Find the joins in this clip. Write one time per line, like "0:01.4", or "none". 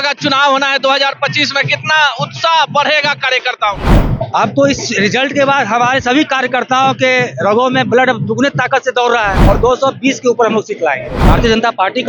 0:09.4
0:11.1